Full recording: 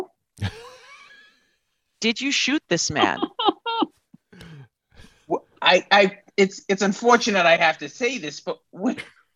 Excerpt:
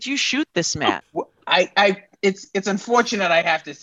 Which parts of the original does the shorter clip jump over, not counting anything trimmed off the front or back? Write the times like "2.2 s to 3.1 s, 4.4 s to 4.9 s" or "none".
3.1 s to 5.1 s